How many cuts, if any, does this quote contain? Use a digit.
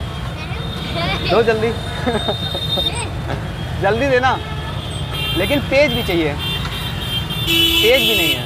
0